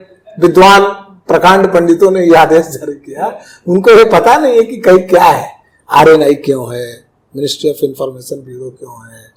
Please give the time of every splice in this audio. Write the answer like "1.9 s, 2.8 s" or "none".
none